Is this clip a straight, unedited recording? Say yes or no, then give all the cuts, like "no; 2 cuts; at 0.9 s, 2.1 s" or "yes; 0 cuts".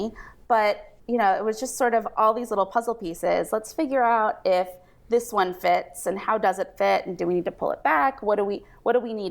no; 1 cut; at 0.9 s